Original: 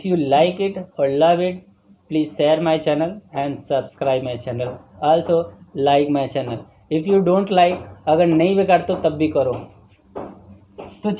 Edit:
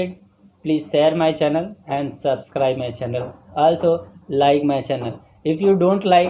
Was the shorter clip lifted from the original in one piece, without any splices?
yes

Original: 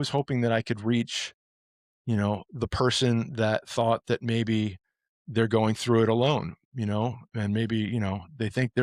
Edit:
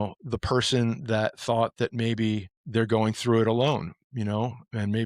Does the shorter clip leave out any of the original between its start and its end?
yes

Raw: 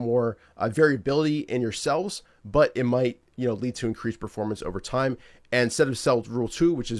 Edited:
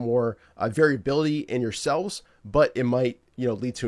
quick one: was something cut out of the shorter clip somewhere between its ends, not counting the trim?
no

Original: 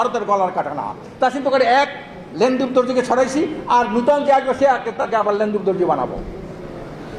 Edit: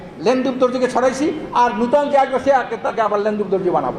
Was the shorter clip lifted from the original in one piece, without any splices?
yes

